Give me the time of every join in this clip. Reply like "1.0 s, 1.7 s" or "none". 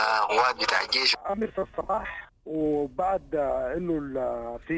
1.1 s